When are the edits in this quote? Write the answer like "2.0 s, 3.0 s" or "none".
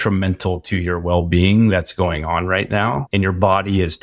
3.0 s